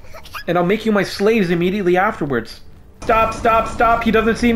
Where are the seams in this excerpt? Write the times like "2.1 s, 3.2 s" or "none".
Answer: 3.0 s